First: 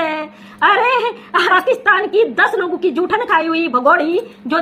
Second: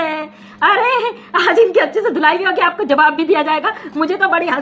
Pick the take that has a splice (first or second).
first